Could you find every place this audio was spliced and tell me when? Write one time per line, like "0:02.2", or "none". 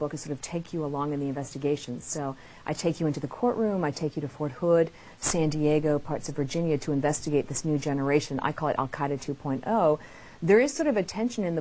none